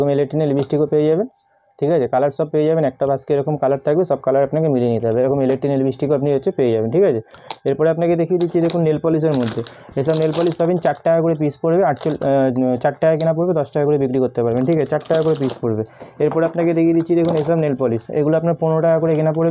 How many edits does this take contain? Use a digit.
0